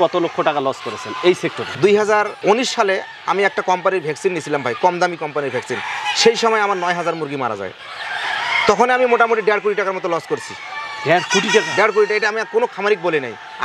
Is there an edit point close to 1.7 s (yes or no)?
yes